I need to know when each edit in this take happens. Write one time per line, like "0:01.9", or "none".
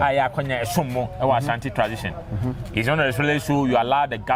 none